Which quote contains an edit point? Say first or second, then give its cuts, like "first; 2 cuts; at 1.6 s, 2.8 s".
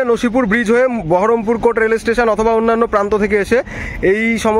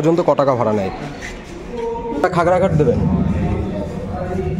second; 1 cut; at 2.2 s